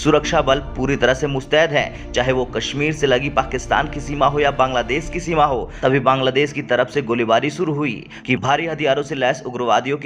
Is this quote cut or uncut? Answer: cut